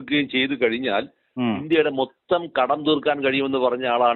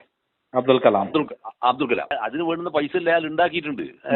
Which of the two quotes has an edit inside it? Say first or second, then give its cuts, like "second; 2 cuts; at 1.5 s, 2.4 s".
second; 1 cut; at 2.1 s